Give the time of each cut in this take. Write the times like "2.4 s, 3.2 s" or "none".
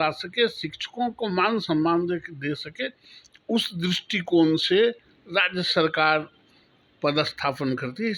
none